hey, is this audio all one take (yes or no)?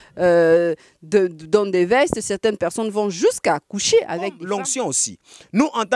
no